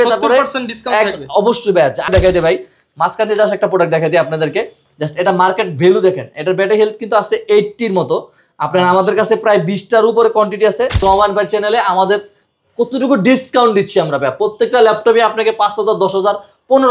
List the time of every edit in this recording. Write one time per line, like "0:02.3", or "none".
0:02.1
0:11.0